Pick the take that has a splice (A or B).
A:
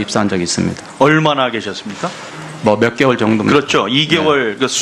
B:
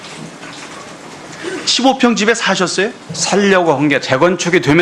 A